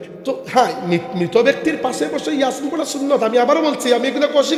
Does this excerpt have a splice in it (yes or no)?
no